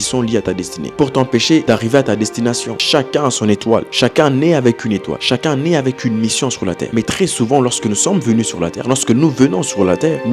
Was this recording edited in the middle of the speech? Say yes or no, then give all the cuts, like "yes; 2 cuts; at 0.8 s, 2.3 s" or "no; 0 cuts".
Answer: yes; 4 cuts; at 1.6 s, 2.7 s, 5.1 s, 6.8 s